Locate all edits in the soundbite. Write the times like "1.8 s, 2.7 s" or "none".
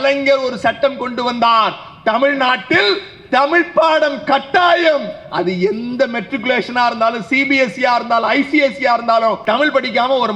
9.4 s

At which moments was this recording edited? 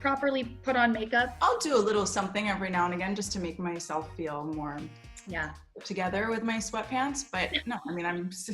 1.3 s

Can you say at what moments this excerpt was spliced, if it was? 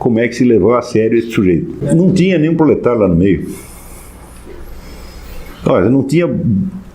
1.8 s

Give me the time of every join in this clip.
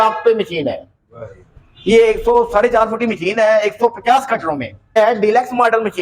4.9 s

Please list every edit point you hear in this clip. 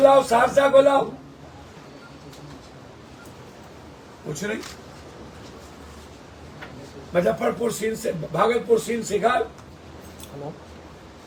none

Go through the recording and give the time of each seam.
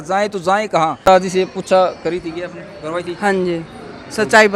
1.0 s

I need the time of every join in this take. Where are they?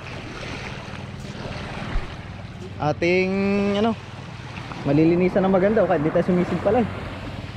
none

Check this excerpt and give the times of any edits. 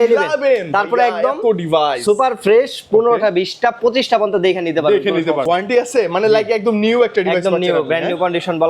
5.4 s

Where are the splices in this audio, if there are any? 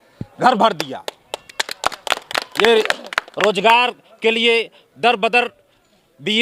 none

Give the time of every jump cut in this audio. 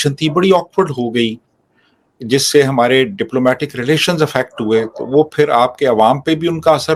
none

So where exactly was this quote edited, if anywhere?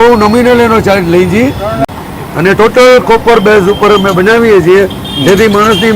1.8 s

